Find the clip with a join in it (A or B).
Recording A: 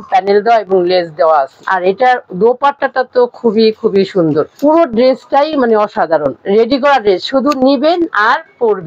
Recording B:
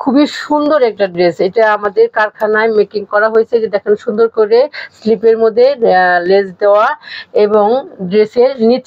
A